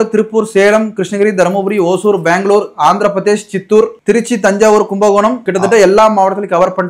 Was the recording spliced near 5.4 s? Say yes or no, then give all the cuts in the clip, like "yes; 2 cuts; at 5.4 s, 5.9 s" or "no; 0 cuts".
yes; 2 cuts; at 4.0 s, 5.4 s